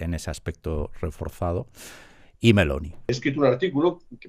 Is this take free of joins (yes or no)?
no